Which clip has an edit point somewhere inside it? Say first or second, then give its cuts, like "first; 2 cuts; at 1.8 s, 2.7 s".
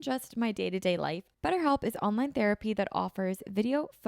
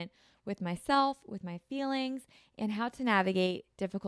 first; 1 cut; at 1.3 s